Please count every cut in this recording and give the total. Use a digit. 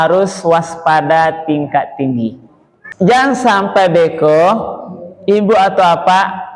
1